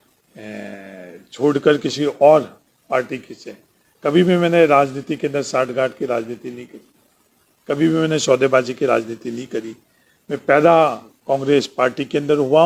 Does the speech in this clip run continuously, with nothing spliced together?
yes; 0 cuts

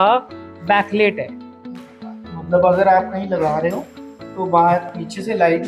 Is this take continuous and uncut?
yes; 0 cuts

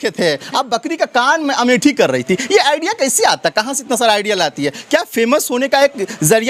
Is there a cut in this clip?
no; 0 cuts

